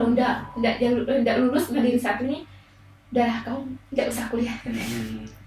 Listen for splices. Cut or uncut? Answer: uncut